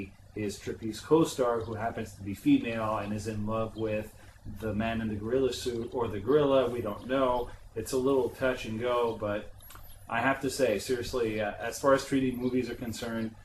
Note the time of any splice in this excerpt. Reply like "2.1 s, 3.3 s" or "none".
none

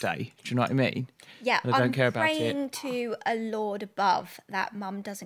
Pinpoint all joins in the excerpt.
none

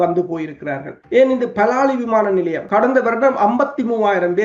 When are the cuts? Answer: 0.9 s, 2.6 s

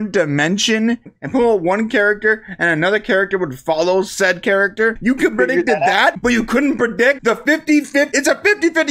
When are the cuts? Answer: 1.1 s, 5.0 s, 6.2 s, 7.2 s, 8.1 s

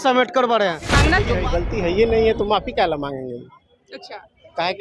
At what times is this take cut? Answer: 1.1 s

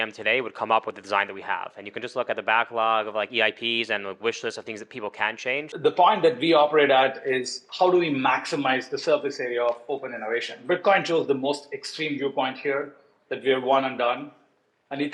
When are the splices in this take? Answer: 5.7 s

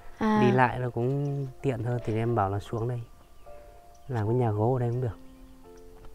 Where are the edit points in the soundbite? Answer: none

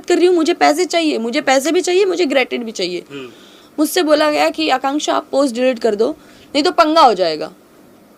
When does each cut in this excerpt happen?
none

